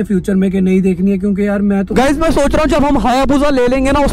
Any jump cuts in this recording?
yes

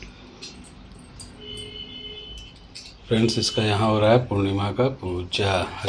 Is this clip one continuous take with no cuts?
yes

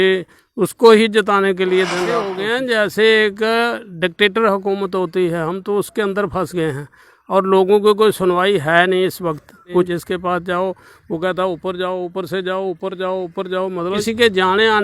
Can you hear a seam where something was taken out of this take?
yes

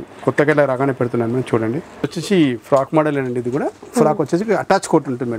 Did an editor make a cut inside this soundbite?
yes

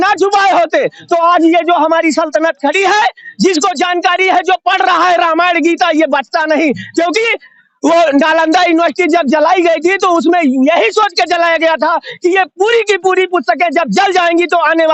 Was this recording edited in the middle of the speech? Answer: no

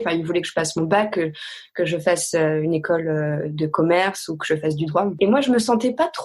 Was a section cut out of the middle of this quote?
yes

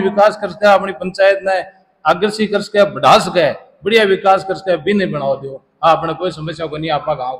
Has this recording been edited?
no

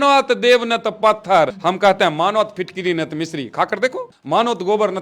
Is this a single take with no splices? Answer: no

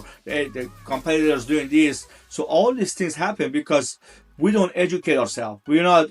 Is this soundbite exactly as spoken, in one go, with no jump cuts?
yes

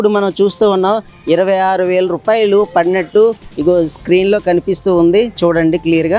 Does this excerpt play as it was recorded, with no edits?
yes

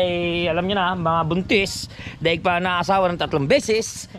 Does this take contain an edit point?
no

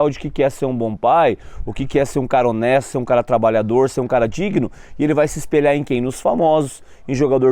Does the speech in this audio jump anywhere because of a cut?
no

